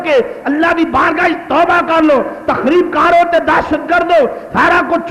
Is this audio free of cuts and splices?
yes; 0 cuts

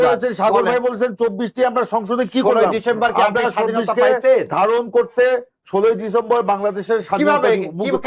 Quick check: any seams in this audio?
no; 0 cuts

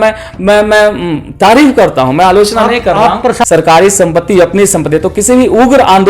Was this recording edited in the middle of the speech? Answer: yes; 1 cut; at 3.4 s

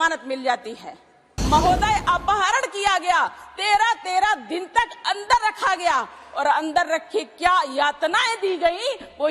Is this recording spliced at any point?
yes; 1 cut; at 1.3 s

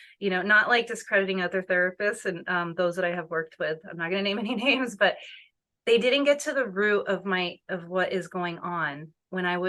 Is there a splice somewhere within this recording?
no; 0 cuts

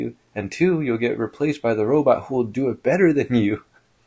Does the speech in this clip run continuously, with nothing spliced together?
yes; 0 cuts

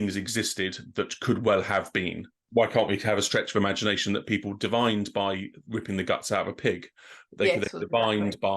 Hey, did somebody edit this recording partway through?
yes; 1 cut; at 5.6 s

